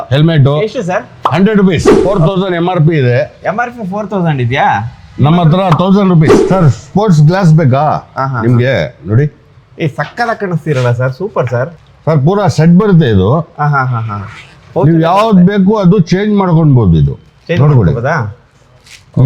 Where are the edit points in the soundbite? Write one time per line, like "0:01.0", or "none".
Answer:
0:01.9
0:06.4